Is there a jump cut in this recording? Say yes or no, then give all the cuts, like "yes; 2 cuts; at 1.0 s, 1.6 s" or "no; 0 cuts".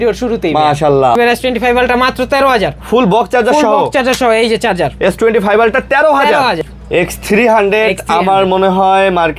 yes; 2 cuts; at 1.2 s, 6.7 s